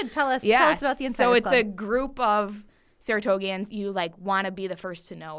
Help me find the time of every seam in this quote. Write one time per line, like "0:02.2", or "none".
0:03.7